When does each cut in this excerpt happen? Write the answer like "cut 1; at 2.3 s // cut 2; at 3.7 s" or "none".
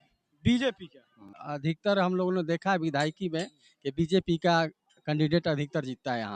cut 1; at 1.4 s